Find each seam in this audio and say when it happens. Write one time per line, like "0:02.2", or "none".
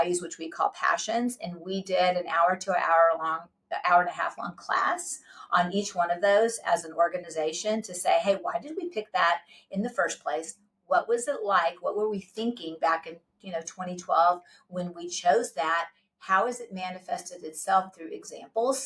none